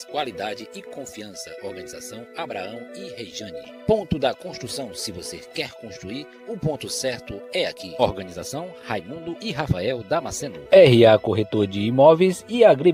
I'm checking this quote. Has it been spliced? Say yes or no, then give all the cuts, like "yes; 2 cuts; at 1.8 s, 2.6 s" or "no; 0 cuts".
no; 0 cuts